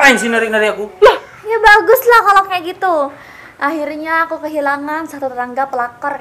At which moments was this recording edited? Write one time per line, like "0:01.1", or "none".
0:01.3

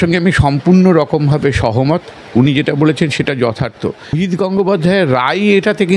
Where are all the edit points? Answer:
0:04.1

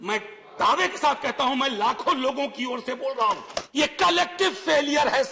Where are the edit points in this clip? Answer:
0:03.6

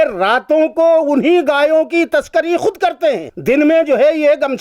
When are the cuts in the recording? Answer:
0:03.3

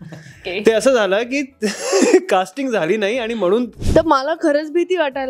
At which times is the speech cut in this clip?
0:03.8

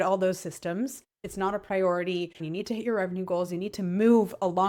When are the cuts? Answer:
0:01.2
0:02.4

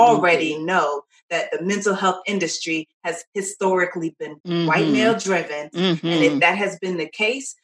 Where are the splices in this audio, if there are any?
0:04.3
0:05.6

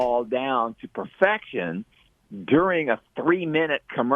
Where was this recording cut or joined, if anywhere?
none

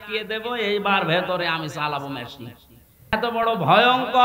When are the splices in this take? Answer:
0:03.1

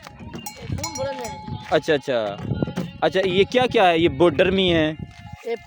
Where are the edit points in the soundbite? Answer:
none

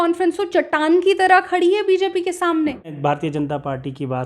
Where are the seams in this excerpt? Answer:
0:02.9

